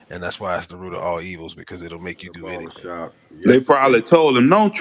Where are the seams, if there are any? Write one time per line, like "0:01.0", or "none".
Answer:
0:02.7

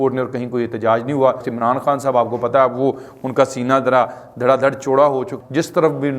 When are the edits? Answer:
0:01.5
0:05.3

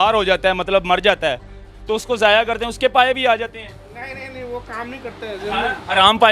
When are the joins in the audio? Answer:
none

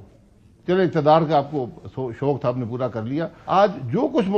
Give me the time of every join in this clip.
0:03.4

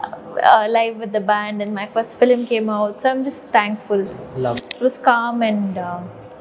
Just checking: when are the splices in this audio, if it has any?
0:04.7

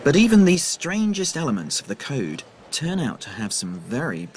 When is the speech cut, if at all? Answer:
0:02.9

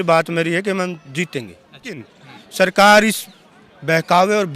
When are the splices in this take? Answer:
0:02.1

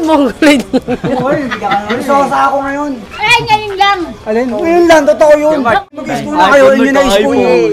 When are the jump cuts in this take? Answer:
0:05.8

